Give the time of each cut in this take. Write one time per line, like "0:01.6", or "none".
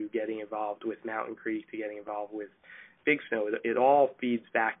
none